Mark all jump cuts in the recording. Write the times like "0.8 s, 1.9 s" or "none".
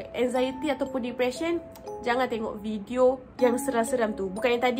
3.3 s